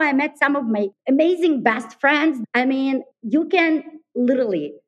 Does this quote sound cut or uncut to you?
cut